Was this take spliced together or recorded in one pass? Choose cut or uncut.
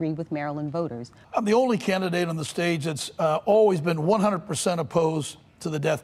uncut